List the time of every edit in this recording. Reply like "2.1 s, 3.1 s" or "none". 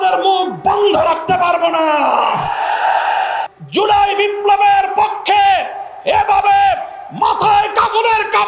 3.5 s

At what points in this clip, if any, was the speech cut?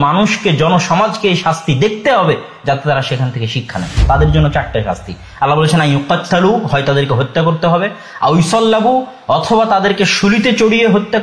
4.0 s

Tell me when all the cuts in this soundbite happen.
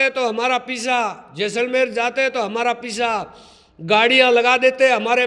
none

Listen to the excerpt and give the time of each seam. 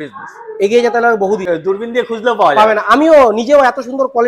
1.5 s

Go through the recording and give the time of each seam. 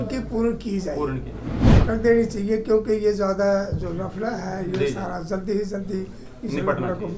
1.7 s

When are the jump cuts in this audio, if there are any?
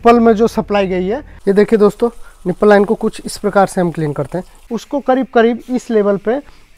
1.3 s, 4.5 s

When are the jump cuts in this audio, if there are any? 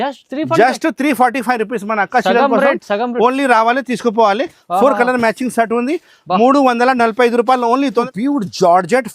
8.1 s

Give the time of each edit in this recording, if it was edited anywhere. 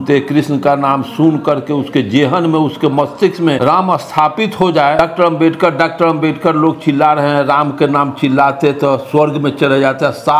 3.6 s, 5.0 s

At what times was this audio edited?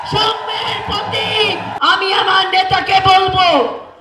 1.7 s

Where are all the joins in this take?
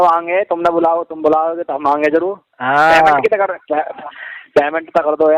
none

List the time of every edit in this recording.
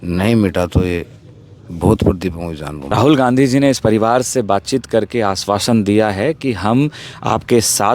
2.9 s

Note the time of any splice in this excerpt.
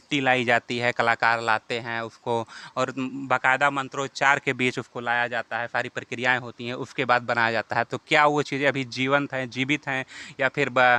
none

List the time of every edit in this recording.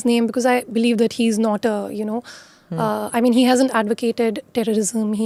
none

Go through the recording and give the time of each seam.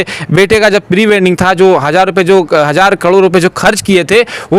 none

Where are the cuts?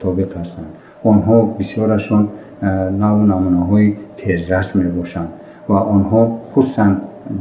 none

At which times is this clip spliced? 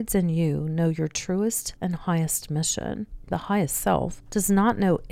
1.7 s, 3.2 s, 4.2 s

